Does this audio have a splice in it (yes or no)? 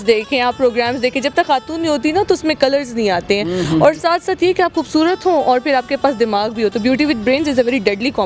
no